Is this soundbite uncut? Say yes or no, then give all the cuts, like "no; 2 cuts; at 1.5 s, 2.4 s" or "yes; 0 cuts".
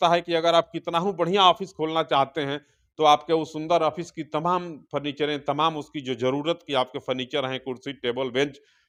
yes; 0 cuts